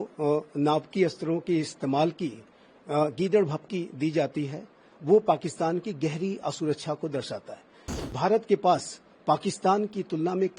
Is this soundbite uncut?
no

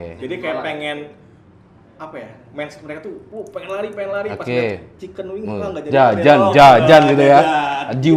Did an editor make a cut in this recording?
no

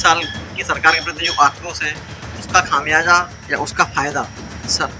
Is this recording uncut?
yes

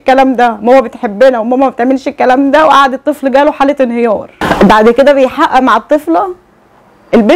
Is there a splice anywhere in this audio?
yes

